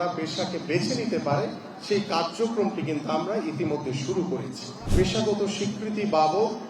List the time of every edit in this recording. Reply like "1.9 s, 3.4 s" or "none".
4.8 s